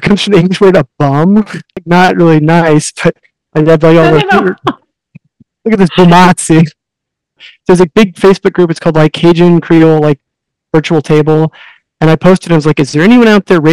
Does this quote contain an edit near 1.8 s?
yes; 2 cuts; at 1.8 s, 7.5 s

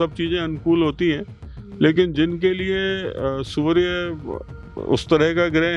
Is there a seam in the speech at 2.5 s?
no; 0 cuts

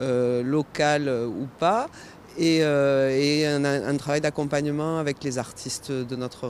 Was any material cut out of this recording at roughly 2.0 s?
yes; 1 cut; at 2.0 s

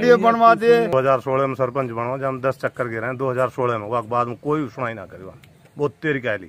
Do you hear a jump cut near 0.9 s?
yes; 1 cut; at 0.9 s

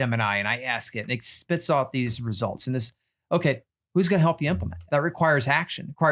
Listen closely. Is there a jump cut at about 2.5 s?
no; 2 cuts; at 3.7 s, 4.7 s

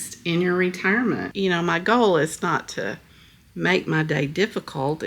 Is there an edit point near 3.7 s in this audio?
no; 1 cut; at 1.3 s

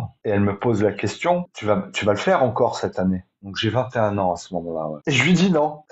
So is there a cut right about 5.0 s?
yes; 1 cut; at 5.0 s

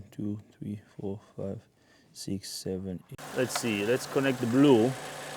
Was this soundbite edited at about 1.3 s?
no; 1 cut; at 3.1 s

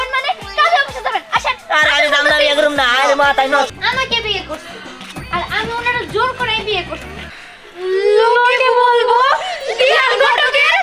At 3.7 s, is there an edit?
yes; 2 cuts; at 3.7 s, 7.0 s

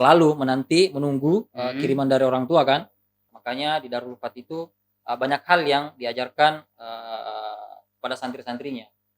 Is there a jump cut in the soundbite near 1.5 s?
no; 1 cut; at 3.3 s

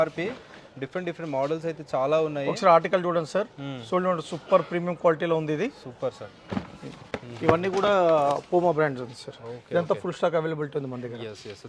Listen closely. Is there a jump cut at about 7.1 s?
no; 0 cuts

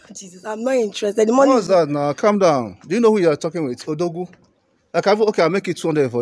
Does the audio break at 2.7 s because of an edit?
no; 0 cuts

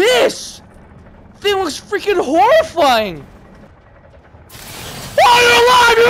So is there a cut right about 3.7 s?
yes; 1 cut; at 3.7 s

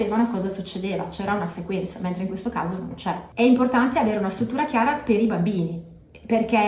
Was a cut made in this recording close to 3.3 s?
yes; 1 cut; at 3.3 s

